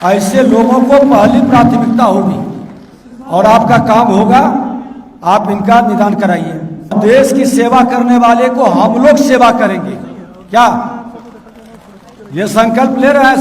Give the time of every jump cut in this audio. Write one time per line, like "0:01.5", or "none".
0:06.9